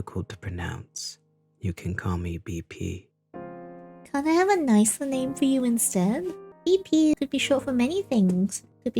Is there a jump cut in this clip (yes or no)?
yes